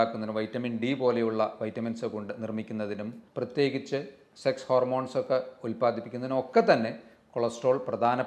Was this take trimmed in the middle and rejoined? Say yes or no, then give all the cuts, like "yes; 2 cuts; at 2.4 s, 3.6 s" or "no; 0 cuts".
yes; 1 cut; at 3.2 s